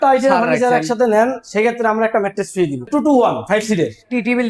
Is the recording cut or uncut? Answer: cut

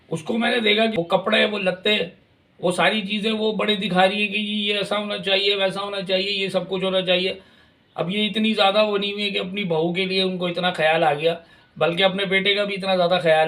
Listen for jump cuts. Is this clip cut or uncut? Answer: cut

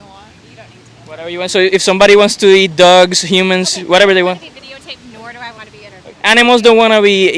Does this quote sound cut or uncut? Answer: uncut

